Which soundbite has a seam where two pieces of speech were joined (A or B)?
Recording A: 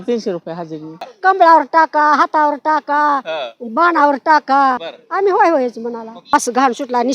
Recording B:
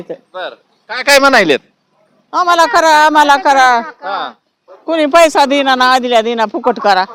A